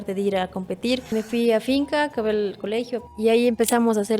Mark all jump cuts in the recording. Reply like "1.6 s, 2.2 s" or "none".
1.1 s, 3.0 s